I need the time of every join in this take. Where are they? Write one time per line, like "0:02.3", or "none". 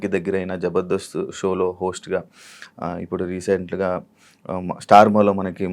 none